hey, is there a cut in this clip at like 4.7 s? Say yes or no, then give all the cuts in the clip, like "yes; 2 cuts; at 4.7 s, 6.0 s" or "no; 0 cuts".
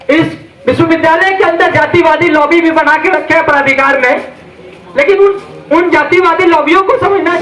no; 0 cuts